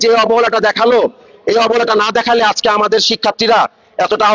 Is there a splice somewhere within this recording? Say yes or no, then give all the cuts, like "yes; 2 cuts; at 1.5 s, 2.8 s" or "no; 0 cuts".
no; 0 cuts